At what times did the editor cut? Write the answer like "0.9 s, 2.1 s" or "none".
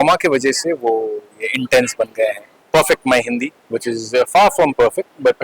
2.6 s